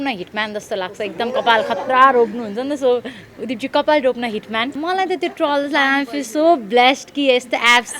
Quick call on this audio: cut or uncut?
cut